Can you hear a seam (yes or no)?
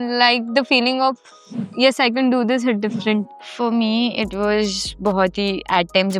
yes